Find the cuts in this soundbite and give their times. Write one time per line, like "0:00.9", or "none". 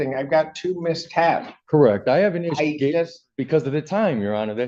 none